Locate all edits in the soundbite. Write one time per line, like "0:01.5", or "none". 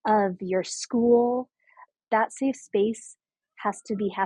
0:01.9